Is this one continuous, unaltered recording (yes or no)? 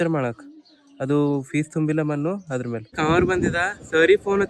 no